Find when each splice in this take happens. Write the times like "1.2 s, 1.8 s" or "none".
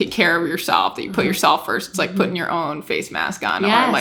none